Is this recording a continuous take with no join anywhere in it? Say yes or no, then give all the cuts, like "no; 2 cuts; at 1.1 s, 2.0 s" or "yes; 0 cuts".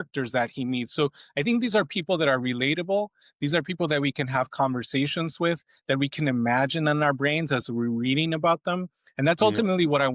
yes; 0 cuts